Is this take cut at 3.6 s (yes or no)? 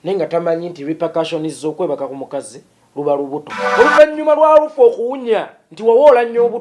yes